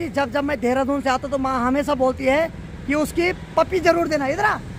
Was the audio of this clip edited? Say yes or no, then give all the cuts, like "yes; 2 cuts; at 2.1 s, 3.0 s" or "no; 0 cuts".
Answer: no; 0 cuts